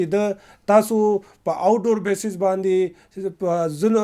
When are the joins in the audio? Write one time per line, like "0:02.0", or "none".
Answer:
none